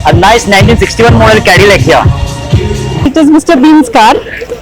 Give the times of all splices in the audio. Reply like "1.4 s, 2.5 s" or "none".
3.1 s